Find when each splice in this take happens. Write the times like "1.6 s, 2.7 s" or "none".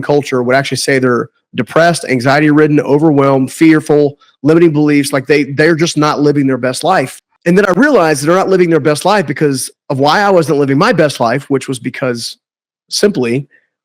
none